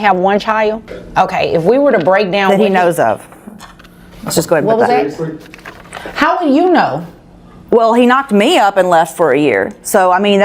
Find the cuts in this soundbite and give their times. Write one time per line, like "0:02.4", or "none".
0:00.9